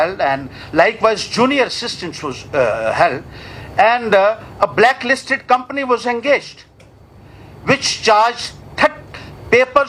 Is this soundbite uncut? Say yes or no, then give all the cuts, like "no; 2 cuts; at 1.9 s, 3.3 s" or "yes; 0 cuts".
yes; 0 cuts